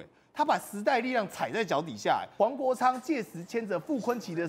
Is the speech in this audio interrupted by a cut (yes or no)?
yes